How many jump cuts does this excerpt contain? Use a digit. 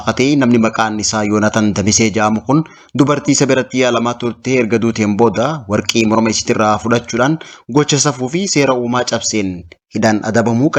0